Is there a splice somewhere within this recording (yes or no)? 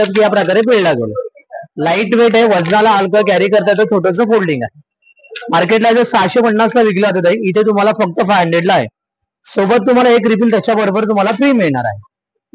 no